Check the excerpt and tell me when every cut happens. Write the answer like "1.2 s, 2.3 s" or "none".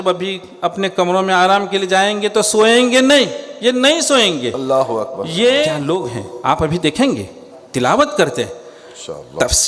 5.8 s